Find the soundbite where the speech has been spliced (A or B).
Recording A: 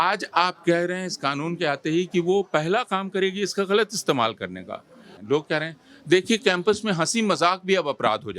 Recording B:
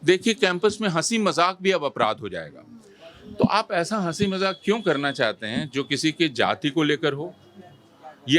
A